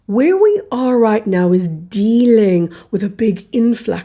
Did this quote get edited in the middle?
no; 0 cuts

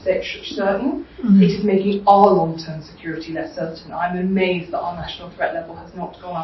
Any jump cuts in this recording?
no; 0 cuts

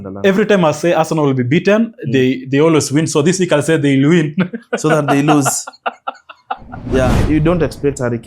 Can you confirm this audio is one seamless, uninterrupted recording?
no; 1 cut; at 7.2 s

